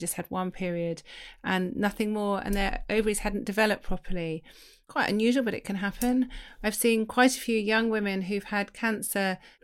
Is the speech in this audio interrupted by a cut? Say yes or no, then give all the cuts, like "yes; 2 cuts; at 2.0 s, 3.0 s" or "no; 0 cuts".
no; 0 cuts